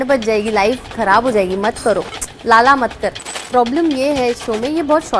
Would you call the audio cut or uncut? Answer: cut